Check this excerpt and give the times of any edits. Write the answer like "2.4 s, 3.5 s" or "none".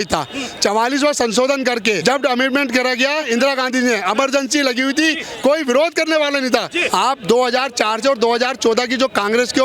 2.0 s, 3.2 s, 6.8 s